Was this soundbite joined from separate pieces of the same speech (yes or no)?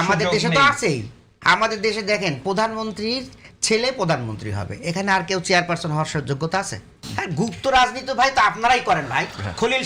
yes